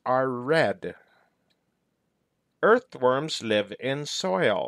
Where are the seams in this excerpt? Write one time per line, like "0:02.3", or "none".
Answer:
0:02.4